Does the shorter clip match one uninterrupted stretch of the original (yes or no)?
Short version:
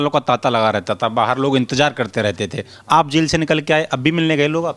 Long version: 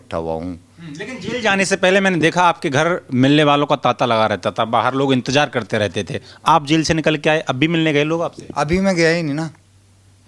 yes